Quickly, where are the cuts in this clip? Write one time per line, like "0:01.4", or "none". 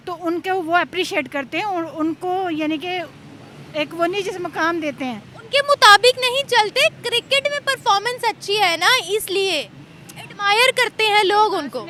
none